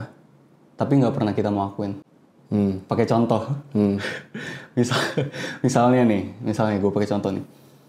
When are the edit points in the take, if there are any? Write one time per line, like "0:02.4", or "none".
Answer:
none